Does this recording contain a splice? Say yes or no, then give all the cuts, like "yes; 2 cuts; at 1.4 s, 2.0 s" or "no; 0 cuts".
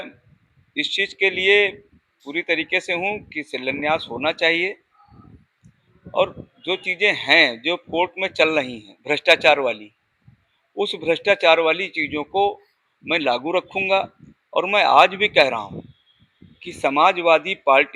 no; 0 cuts